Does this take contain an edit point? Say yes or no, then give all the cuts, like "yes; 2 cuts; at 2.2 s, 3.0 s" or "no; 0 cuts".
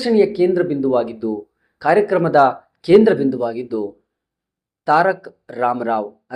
no; 0 cuts